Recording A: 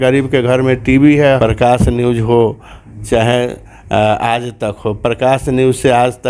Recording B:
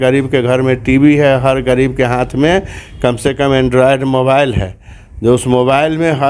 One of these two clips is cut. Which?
A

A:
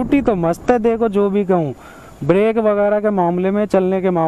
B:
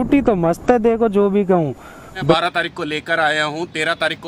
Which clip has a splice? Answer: B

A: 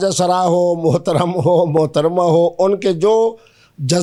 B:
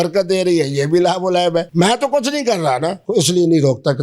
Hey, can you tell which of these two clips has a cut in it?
B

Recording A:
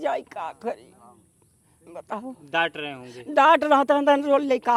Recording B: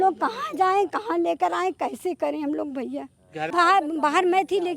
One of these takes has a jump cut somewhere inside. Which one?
B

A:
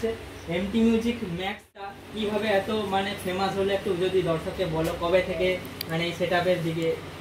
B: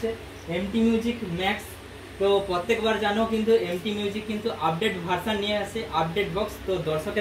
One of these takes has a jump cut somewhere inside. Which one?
A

